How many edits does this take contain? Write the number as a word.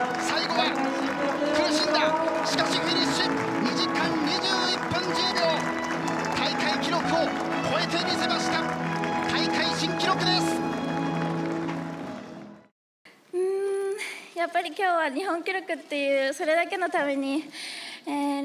one